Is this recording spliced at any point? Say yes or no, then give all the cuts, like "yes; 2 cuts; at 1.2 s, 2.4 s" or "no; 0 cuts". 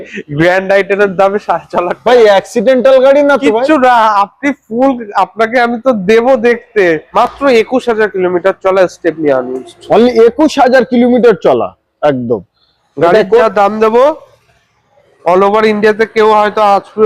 yes; 1 cut; at 7.1 s